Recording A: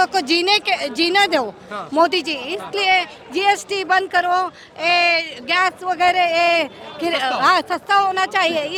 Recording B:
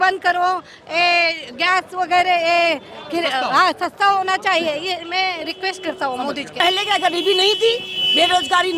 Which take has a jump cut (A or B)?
B